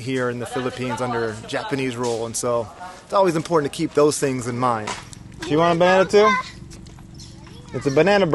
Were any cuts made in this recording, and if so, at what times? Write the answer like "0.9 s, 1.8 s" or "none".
4.9 s